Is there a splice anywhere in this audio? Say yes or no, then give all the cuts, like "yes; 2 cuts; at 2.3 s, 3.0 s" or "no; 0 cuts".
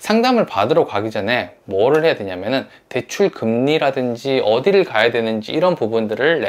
no; 0 cuts